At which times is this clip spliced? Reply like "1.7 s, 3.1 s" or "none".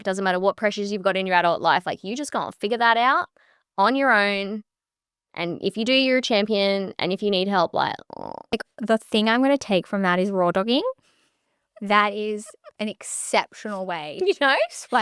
8.5 s

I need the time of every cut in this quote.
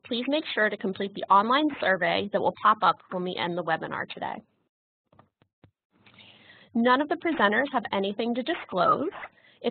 5.6 s

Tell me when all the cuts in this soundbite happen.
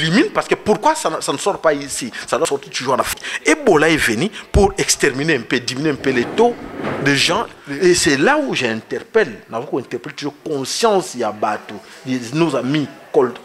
7.5 s

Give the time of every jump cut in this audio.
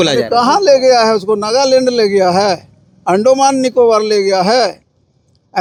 none

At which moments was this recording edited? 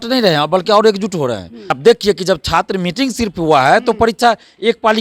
1.8 s

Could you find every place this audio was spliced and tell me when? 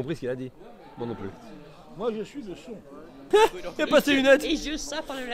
3.1 s

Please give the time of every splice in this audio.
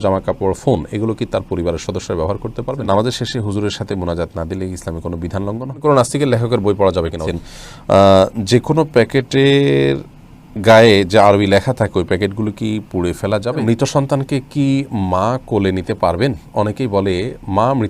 2.9 s, 5.8 s, 7.3 s, 13.6 s

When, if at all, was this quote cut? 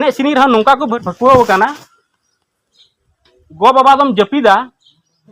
1.0 s

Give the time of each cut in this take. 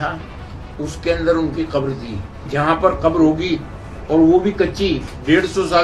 2.5 s

